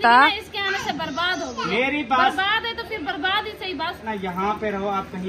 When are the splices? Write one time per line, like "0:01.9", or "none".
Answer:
0:04.0